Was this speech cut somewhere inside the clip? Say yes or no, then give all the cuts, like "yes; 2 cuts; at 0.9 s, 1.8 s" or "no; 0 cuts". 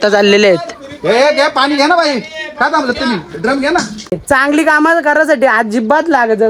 yes; 1 cut; at 4.2 s